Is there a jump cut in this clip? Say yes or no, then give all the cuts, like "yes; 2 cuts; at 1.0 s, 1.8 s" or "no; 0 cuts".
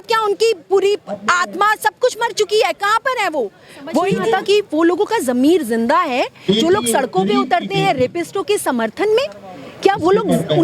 yes; 1 cut; at 4.1 s